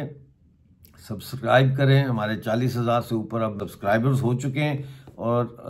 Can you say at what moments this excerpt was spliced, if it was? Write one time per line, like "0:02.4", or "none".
0:03.6